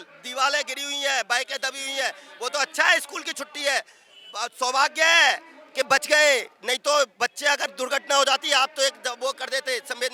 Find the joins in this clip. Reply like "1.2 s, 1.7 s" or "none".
none